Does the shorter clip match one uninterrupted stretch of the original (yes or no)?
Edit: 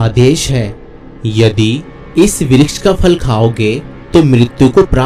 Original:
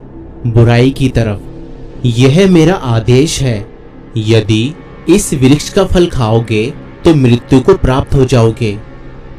yes